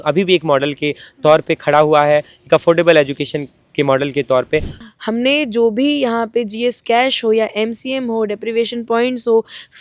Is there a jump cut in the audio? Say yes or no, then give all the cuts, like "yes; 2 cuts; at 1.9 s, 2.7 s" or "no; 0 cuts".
yes; 1 cut; at 4.7 s